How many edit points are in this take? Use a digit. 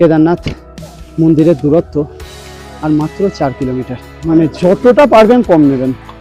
1